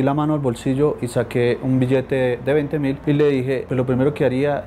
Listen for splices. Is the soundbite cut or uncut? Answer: cut